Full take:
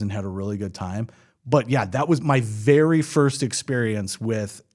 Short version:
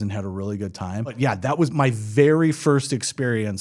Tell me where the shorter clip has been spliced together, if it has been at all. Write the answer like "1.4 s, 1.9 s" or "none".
1.2 s